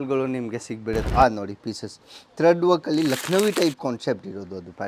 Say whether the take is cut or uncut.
cut